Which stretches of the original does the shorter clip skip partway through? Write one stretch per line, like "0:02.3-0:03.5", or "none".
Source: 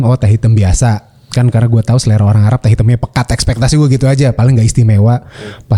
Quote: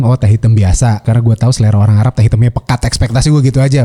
0:01.1-0:01.5